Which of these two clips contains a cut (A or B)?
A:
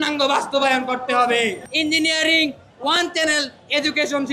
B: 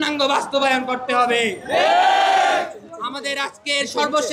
A